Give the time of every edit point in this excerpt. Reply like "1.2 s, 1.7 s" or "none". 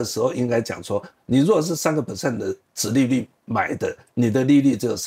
none